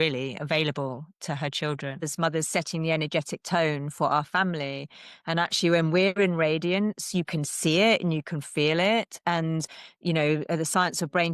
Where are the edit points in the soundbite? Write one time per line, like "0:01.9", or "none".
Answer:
0:02.0